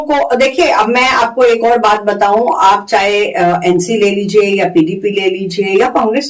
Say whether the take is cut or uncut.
uncut